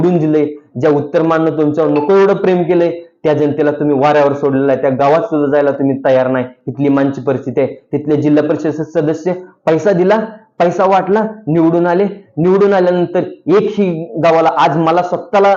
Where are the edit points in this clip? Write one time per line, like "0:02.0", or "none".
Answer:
none